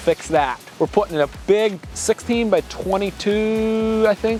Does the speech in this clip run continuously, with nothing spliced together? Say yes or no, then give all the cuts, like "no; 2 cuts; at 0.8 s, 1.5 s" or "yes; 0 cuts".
yes; 0 cuts